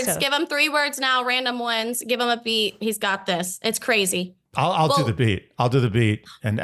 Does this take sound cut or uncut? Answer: cut